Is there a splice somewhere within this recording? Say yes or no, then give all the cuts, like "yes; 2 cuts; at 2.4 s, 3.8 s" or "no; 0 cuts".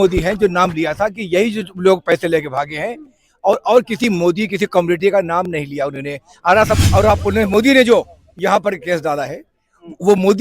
yes; 1 cut; at 6.8 s